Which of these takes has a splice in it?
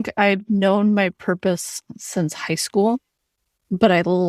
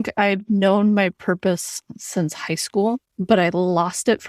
second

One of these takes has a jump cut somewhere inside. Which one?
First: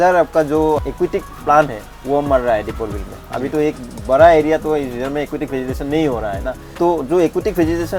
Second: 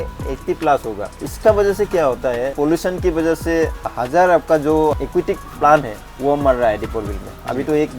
second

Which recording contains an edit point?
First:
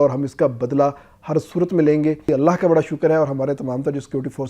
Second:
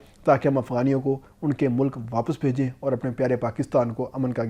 first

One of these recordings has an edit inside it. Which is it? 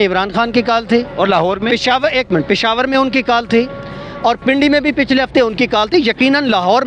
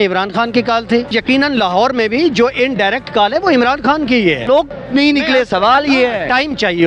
second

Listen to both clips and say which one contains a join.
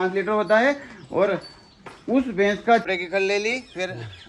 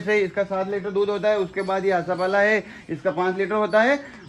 first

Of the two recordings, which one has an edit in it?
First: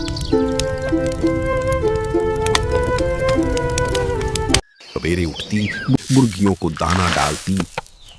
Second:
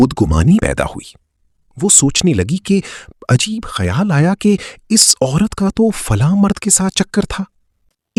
first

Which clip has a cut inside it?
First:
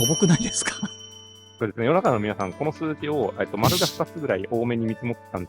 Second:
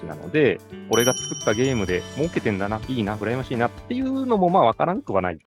first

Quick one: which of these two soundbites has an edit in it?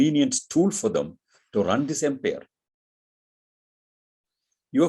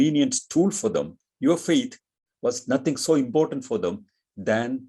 second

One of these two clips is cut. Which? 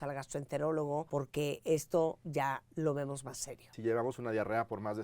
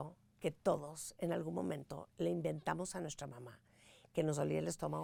first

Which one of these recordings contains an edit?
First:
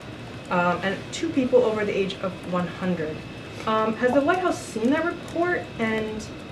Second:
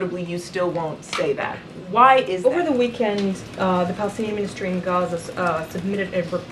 second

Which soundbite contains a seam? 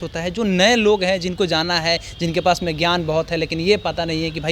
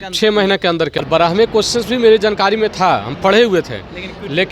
second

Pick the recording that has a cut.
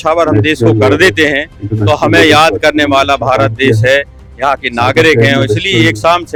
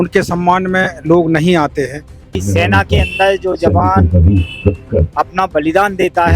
second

